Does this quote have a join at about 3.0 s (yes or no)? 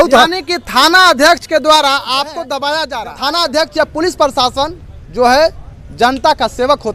yes